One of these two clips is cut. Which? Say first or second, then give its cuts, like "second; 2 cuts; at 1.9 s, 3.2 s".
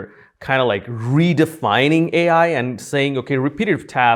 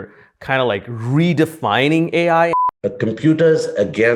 second; 1 cut; at 2.6 s